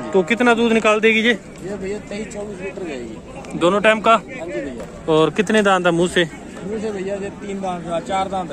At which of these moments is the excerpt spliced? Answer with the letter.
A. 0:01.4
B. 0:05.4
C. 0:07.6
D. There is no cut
D